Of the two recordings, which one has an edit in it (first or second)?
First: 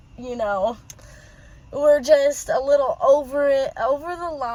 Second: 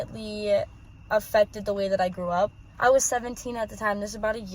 second